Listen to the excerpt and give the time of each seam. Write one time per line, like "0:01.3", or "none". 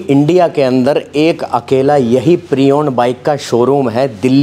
none

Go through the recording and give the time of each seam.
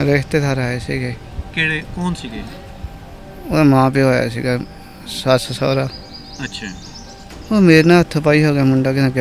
none

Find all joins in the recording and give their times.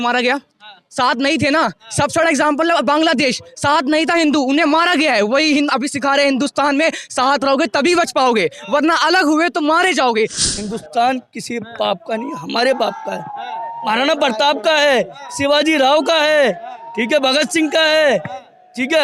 0:10.4

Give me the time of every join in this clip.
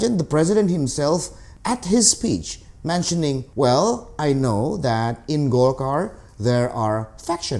none

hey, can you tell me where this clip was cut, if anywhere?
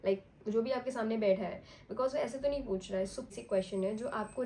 0:03.4

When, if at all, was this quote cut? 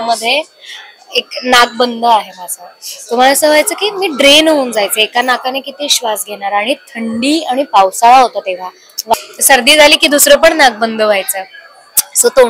0:09.1

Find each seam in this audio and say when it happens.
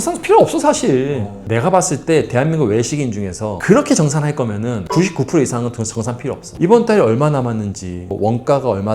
0:01.4

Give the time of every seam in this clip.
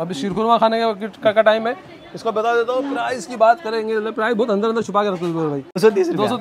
none

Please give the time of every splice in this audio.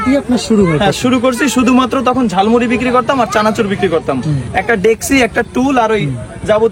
none

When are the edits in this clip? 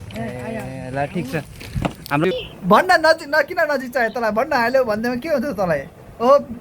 0:02.4

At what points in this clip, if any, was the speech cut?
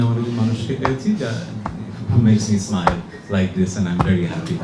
none

